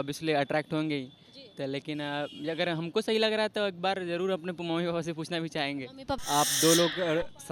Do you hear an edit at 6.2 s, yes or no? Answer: yes